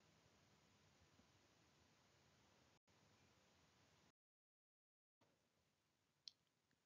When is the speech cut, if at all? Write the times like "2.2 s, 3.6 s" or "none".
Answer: 1.2 s